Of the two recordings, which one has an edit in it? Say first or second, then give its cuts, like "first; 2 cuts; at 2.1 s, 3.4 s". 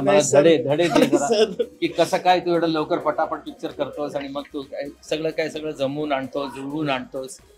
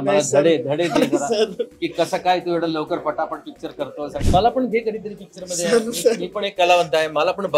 second; 1 cut; at 4.2 s